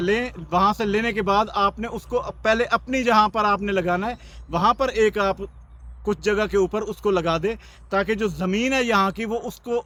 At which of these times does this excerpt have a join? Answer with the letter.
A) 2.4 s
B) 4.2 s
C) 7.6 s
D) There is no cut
D